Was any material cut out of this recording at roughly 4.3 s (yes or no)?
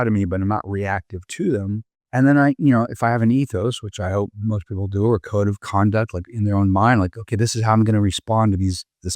no